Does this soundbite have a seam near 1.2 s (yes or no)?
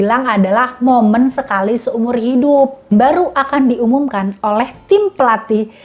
no